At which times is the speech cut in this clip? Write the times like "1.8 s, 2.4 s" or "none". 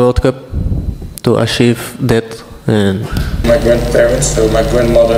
3.4 s